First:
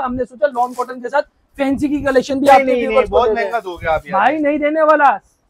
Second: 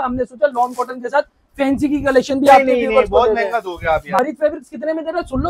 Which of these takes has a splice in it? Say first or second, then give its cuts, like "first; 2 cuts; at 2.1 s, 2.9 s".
second; 1 cut; at 4.2 s